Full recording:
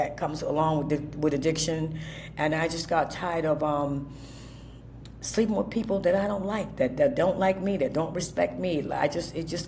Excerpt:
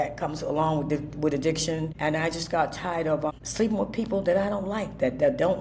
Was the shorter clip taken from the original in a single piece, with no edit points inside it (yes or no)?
no